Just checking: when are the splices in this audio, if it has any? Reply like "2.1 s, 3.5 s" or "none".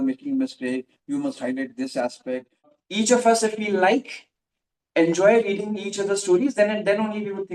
2.8 s